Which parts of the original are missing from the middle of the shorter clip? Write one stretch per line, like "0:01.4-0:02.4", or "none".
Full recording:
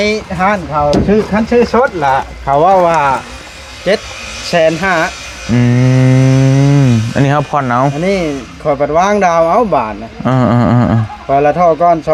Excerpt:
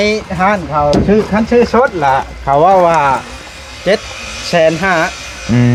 none